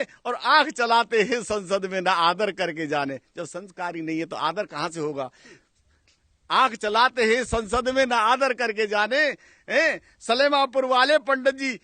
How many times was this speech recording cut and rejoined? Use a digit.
0